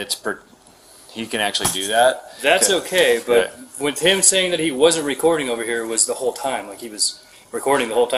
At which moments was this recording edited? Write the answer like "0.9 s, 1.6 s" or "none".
none